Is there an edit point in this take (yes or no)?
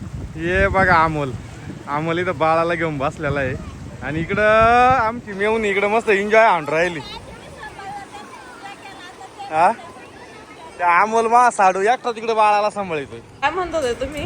yes